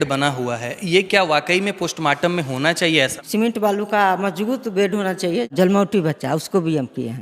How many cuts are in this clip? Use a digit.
2